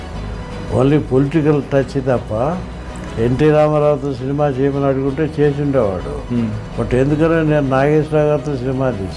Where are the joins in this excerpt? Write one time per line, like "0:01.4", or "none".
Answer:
none